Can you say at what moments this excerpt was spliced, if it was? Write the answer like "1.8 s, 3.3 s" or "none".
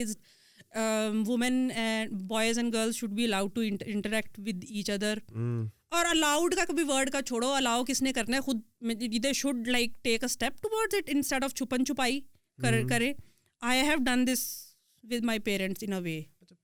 none